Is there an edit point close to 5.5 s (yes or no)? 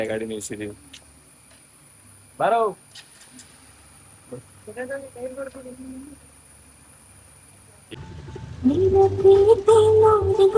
no